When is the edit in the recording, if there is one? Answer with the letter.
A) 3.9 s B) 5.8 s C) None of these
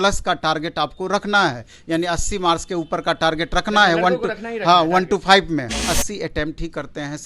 B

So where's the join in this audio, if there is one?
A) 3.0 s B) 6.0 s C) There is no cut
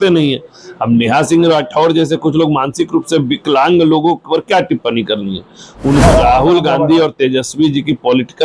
B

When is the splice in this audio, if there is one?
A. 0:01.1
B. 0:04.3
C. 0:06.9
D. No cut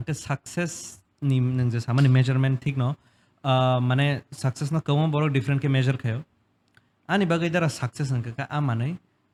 D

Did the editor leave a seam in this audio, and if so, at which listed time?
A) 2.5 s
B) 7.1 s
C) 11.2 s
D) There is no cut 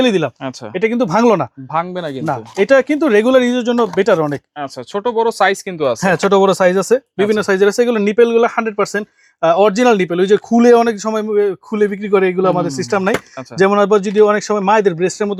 D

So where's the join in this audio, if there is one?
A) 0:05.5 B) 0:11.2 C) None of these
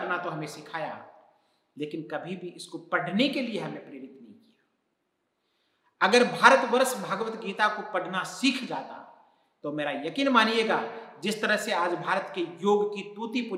C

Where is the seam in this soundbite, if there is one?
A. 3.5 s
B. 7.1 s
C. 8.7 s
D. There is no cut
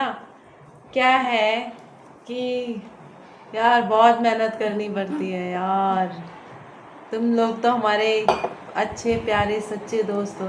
D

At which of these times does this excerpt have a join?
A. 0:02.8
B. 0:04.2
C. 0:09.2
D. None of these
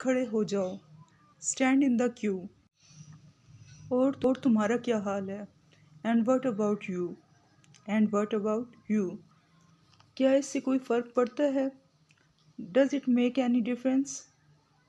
B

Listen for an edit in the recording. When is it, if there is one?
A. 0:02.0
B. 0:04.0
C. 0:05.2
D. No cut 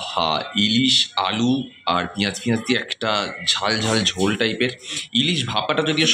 D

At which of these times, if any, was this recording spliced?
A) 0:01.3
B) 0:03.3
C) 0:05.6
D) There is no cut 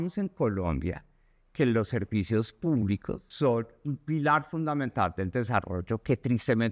B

